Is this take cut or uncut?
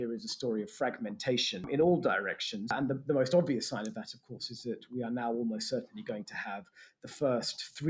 cut